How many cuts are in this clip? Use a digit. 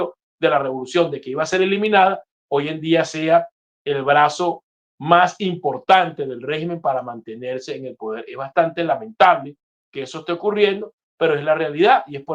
0